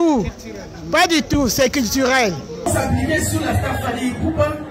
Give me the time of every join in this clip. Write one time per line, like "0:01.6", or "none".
0:02.7